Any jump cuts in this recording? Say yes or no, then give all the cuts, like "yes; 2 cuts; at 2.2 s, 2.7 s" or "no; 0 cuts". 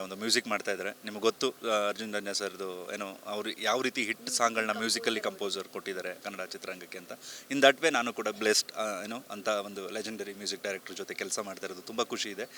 no; 0 cuts